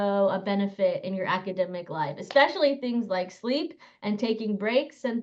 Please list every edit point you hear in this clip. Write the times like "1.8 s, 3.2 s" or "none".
none